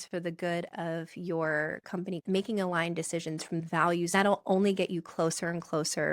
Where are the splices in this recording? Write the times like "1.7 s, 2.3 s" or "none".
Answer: 3.7 s